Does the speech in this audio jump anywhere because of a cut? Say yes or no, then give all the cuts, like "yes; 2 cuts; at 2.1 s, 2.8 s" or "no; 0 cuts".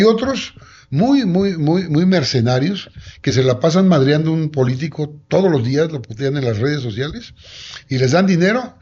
no; 0 cuts